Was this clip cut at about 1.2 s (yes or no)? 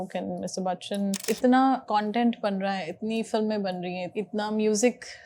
yes